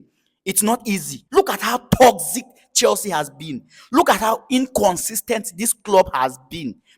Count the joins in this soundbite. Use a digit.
1